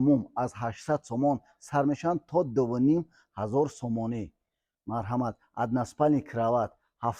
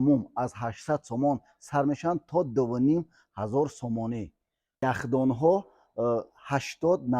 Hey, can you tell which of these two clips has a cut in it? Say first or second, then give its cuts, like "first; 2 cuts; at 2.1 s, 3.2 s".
second; 1 cut; at 4.8 s